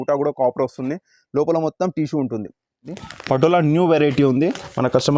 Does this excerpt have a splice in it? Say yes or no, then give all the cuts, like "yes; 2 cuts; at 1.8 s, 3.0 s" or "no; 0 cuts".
yes; 1 cut; at 3.0 s